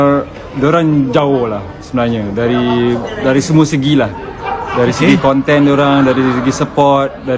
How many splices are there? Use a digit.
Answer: 0